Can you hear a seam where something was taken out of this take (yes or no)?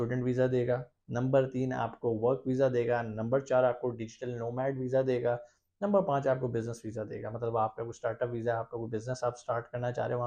no